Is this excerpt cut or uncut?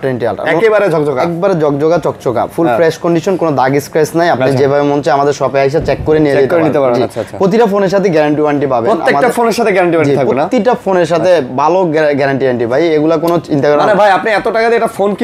uncut